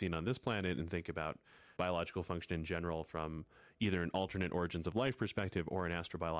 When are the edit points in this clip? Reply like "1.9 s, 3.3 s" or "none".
none